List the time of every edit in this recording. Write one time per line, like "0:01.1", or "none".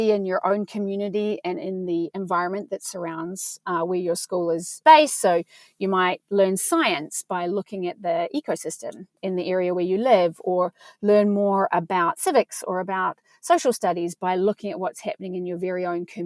0:04.8
0:09.1